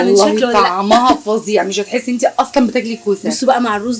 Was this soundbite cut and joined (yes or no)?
no